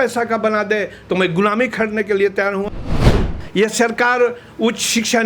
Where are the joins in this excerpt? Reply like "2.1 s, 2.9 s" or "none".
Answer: 2.9 s